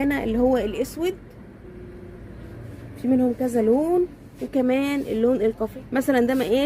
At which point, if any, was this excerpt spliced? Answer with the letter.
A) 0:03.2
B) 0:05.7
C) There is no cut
B